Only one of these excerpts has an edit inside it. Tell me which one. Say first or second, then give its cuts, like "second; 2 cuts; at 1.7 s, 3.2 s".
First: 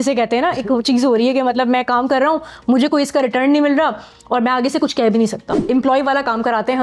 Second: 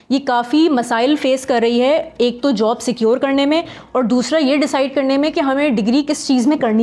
first; 1 cut; at 5.6 s